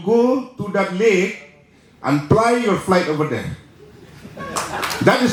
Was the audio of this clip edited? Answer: no; 0 cuts

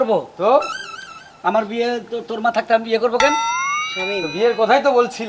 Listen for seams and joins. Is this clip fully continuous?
yes; 0 cuts

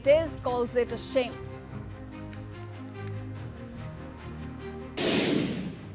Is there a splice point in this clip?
yes; 1 cut; at 5.0 s

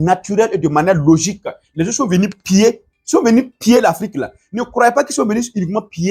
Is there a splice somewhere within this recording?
no; 0 cuts

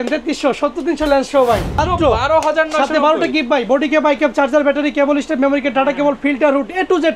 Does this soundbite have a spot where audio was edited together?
yes; 1 cut; at 1.8 s

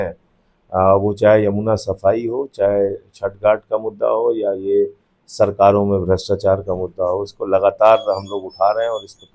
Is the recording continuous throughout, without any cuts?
yes; 0 cuts

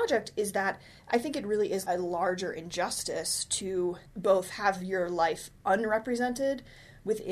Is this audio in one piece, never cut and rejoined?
no; 2 cuts; at 1.8 s, 4.1 s

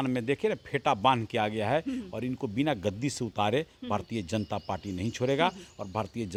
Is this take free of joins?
yes; 0 cuts

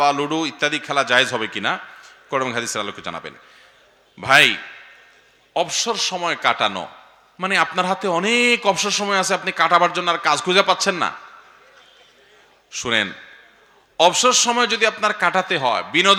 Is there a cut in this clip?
no; 0 cuts

